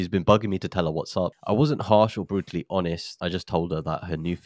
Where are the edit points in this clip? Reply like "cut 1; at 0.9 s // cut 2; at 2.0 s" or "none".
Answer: cut 1; at 1.4 s // cut 2; at 3.1 s